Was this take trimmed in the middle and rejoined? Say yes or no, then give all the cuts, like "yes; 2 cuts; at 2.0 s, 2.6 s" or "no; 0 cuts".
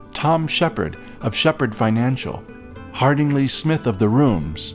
no; 0 cuts